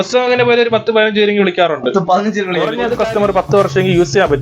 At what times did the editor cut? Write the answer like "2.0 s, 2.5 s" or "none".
2.7 s